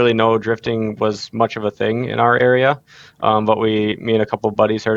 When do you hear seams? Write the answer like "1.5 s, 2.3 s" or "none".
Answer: none